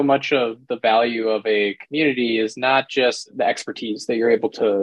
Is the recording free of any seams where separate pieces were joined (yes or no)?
no